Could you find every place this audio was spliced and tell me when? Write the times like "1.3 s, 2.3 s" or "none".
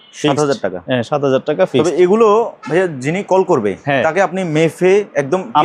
none